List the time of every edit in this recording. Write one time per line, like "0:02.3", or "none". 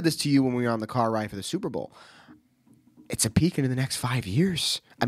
none

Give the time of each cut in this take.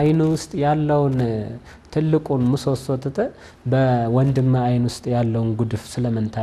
none

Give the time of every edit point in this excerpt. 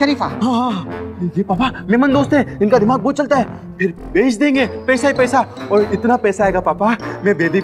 none

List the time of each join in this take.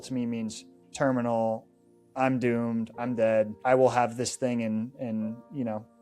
0:03.5

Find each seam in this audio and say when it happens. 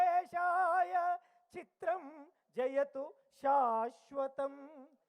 none

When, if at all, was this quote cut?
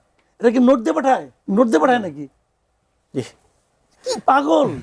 0:01.3

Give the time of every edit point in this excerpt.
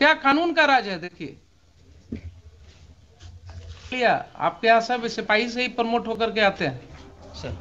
0:03.9

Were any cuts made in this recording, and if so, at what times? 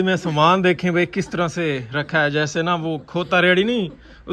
none

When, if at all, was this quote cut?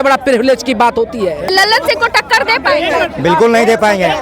0:01.5

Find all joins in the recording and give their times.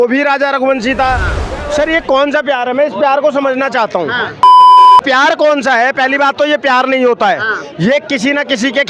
0:01.4

